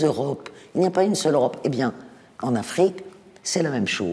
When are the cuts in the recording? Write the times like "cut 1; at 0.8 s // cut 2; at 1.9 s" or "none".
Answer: none